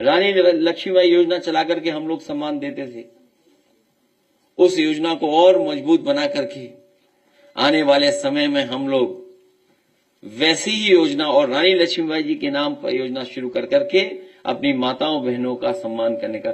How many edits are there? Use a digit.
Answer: 0